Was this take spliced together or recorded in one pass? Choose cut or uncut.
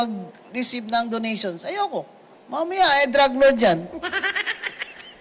uncut